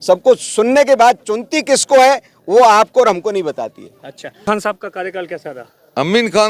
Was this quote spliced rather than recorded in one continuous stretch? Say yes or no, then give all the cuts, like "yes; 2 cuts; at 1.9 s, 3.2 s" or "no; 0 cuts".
yes; 1 cut; at 4.4 s